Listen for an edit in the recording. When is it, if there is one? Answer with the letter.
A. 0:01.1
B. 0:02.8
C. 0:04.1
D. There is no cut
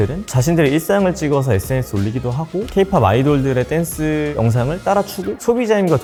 D